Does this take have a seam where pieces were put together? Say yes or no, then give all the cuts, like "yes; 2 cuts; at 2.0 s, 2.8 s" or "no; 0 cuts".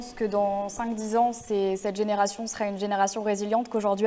no; 0 cuts